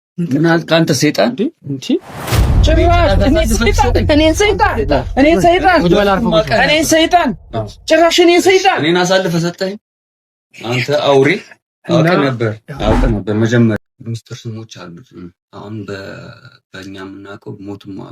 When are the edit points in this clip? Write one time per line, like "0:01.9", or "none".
0:13.8